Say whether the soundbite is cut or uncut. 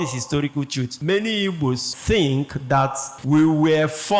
cut